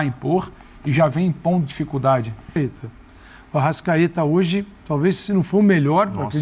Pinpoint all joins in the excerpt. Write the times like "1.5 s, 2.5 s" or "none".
2.6 s